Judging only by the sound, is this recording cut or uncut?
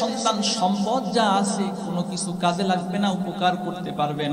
uncut